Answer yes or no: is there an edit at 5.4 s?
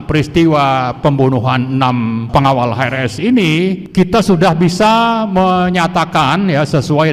no